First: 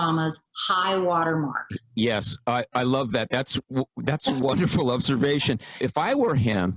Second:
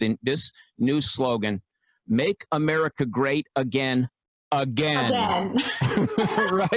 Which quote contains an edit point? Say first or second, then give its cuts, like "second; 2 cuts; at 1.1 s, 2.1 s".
first; 1 cut; at 5.8 s